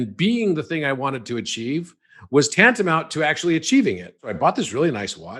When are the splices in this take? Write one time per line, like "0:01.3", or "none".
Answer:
0:04.3